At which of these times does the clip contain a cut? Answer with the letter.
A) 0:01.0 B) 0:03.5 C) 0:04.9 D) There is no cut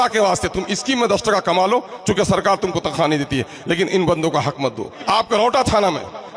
C